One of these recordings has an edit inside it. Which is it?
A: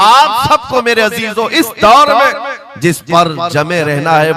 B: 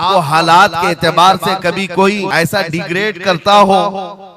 B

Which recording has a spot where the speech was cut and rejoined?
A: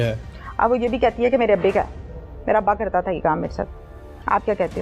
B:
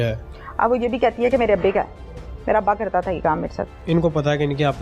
B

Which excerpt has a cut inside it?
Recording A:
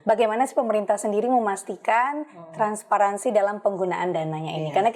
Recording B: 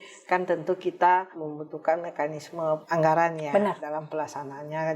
B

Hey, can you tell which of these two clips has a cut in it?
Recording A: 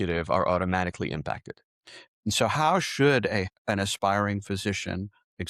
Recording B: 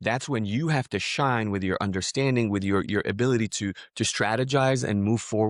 A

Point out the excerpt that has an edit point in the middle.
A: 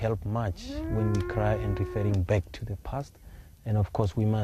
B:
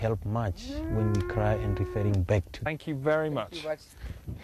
A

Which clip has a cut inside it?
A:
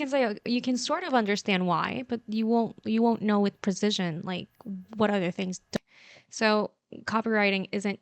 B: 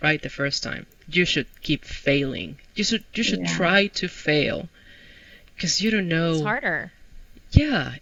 A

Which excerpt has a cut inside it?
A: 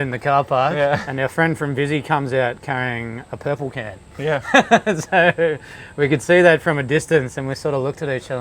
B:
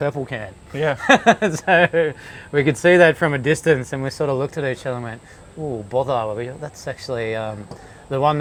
A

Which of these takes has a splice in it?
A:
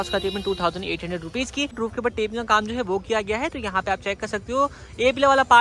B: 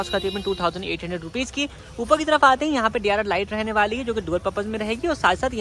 A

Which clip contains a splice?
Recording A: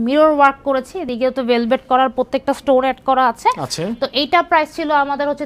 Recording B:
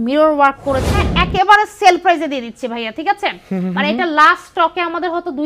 B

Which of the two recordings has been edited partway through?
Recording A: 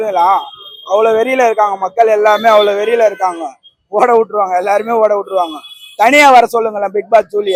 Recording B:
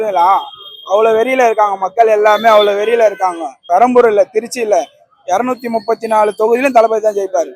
B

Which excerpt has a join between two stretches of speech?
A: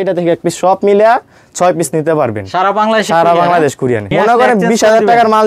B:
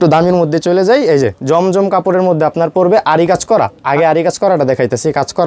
A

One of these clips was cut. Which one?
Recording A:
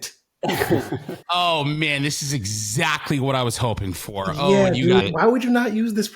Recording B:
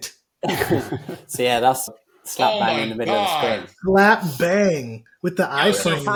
A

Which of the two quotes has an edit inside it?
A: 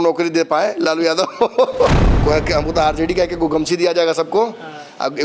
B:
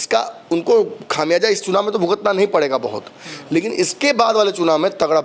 A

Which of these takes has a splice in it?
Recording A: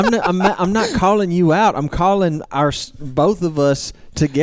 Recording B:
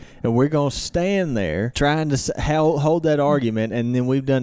B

